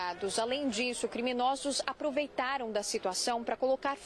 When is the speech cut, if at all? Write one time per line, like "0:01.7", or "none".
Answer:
none